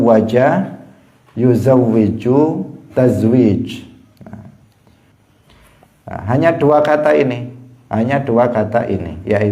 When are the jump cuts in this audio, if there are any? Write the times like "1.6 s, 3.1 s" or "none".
5.1 s